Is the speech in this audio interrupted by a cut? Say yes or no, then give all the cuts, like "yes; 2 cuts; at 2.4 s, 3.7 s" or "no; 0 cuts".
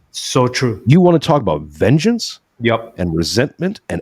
no; 0 cuts